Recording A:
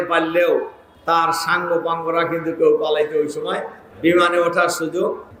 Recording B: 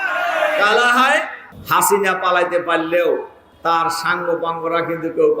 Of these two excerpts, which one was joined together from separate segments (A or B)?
B